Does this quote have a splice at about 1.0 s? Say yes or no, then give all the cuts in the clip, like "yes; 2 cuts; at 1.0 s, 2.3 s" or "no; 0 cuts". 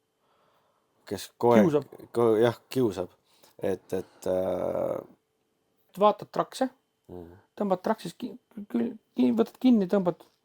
no; 1 cut; at 5.9 s